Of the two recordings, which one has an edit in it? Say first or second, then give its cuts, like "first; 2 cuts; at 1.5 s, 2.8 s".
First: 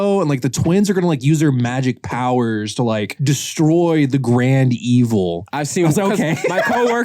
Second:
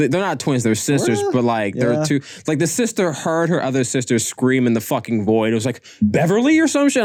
first; 2 cuts; at 3.1 s, 5.5 s